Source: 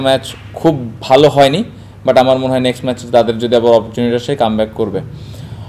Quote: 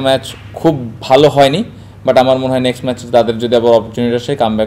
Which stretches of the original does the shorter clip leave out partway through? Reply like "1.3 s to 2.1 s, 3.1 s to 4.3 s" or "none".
none